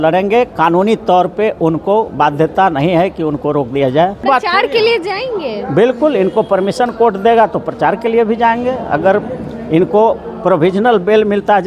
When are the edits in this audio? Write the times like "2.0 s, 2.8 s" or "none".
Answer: 4.2 s